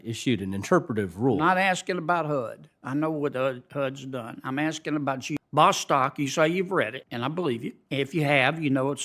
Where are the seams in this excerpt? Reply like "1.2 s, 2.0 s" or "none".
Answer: 5.4 s, 7.0 s, 7.8 s